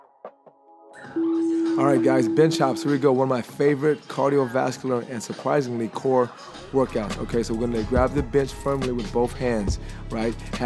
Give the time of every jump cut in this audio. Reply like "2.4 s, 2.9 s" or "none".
1.0 s